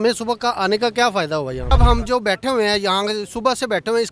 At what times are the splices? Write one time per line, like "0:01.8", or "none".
0:01.7